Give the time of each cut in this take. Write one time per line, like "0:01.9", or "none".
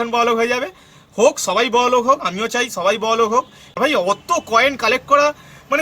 0:03.8

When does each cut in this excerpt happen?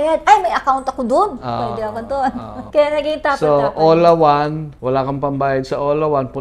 0:02.6
0:04.7

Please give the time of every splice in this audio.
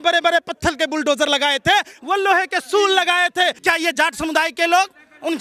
0:03.6

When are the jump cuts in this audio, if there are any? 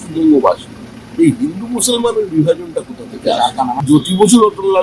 0:03.8

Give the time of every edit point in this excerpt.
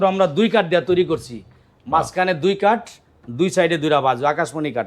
none

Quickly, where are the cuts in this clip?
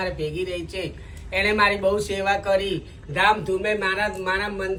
none

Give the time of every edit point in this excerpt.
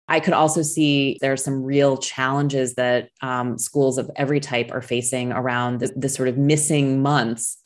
0:01.2
0:05.9

